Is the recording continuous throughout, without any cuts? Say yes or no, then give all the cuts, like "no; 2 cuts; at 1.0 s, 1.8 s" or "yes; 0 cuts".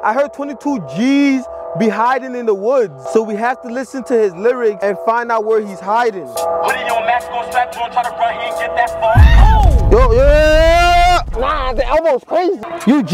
yes; 0 cuts